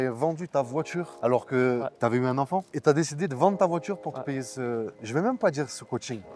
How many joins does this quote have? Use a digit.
1